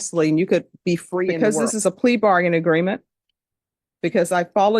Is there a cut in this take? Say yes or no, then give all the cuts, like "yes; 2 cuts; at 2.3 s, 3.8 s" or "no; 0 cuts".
yes; 1 cut; at 1.3 s